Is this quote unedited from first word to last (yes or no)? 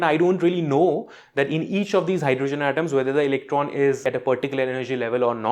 no